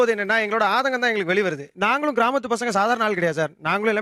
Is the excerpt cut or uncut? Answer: uncut